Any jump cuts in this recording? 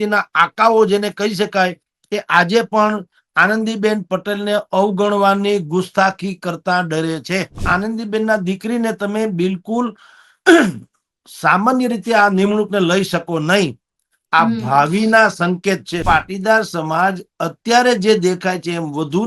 yes; 2 cuts; at 7.6 s, 16.0 s

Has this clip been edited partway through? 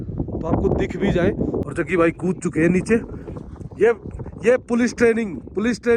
yes; 1 cut; at 1.7 s

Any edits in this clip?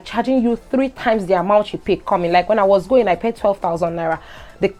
no; 0 cuts

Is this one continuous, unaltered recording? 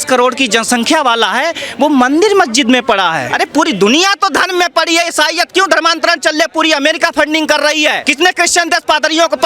no; 2 cuts; at 3.3 s, 8.0 s

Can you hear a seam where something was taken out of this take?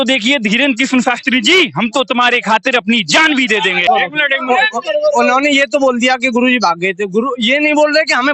yes; 1 cut; at 3.8 s

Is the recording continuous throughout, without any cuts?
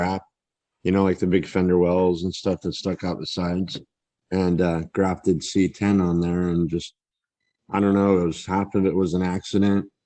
no; 1 cut; at 4.1 s

